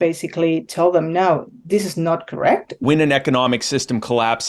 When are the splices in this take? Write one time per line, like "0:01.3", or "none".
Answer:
0:02.8